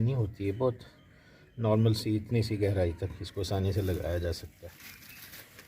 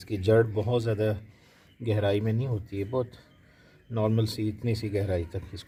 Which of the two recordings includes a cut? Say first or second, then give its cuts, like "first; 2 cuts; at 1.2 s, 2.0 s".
first; 1 cut; at 4.5 s